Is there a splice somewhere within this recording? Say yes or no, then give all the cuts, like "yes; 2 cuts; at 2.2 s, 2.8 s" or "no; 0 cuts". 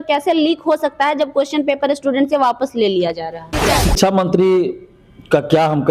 yes; 1 cut; at 3.9 s